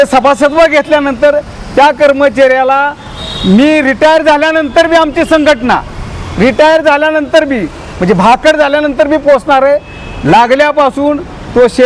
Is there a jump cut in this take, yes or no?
no